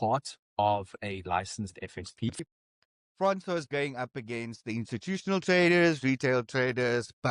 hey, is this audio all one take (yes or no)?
no